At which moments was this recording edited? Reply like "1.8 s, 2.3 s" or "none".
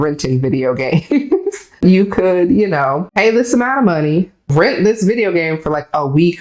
1.8 s, 3.1 s, 4.4 s